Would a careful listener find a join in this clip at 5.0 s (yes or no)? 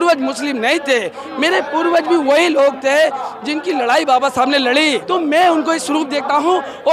yes